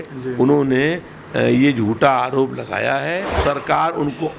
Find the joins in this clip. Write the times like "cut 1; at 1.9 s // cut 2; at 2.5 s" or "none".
cut 1; at 3.3 s